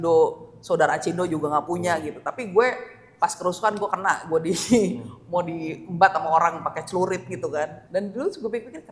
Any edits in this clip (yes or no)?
yes